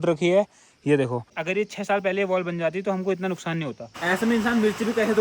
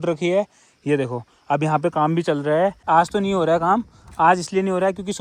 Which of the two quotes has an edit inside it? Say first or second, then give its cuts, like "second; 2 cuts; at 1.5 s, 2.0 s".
first; 2 cuts; at 1.3 s, 3.9 s